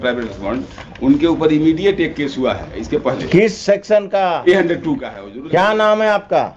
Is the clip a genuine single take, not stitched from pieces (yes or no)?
yes